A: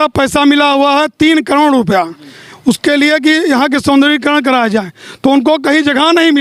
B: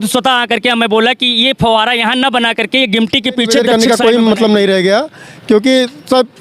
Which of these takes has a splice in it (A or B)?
B